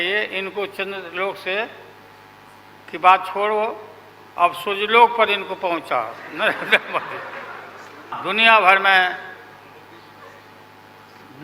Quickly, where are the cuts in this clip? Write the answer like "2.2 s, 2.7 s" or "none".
8.2 s